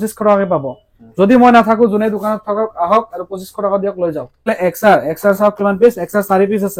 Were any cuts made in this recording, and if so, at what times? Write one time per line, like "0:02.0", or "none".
0:04.5